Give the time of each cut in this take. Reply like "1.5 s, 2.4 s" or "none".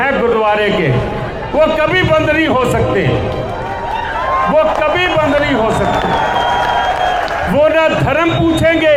none